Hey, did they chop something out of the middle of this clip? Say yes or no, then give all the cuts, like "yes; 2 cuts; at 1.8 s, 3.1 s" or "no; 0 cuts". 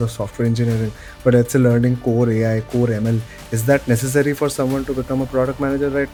no; 0 cuts